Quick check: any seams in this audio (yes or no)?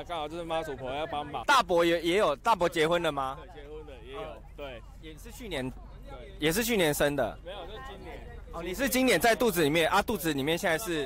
yes